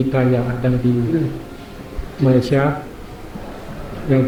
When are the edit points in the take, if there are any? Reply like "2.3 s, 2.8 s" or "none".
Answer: none